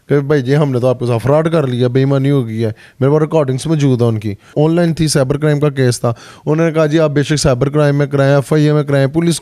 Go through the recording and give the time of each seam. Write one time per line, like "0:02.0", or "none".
0:04.5